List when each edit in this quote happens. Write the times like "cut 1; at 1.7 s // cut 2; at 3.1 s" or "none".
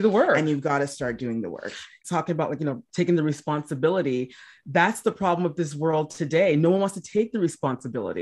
cut 1; at 2.0 s